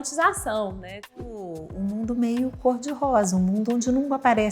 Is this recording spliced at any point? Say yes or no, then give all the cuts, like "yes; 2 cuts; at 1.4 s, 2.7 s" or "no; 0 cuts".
yes; 1 cut; at 1.1 s